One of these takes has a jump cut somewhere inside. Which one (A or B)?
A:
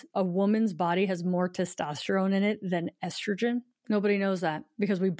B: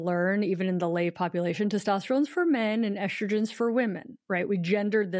A